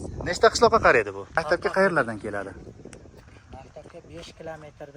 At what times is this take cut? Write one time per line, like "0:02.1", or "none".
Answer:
0:01.4

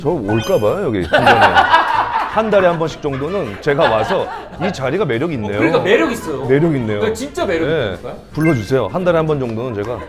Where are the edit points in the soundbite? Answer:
none

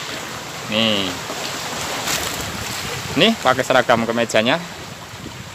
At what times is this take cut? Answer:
0:02.1

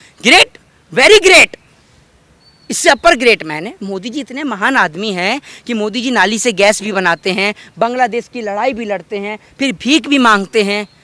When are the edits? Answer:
none

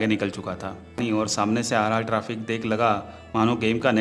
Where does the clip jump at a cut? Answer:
0:01.0

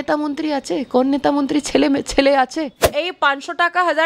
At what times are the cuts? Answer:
0:03.0

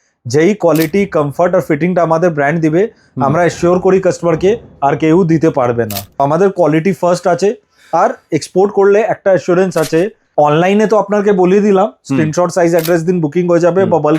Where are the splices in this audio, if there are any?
0:06.2
0:10.2

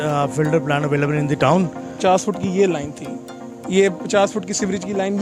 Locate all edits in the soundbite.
0:01.9

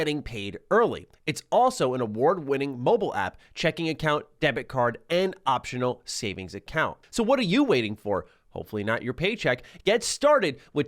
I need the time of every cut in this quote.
0:07.0

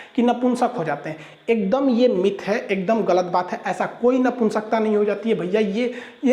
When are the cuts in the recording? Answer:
none

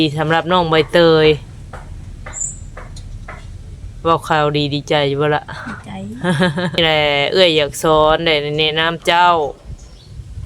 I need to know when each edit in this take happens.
0:06.8

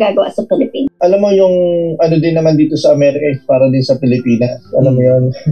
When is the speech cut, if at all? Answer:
0:00.9

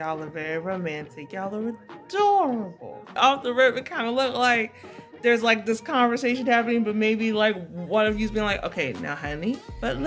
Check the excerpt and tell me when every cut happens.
0:03.1

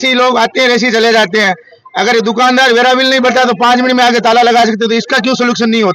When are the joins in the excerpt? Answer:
none

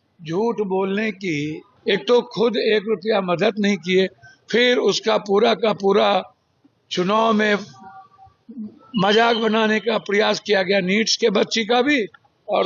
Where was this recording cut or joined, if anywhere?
0:01.6

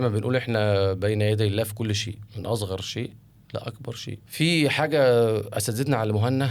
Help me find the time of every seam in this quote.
0:04.2

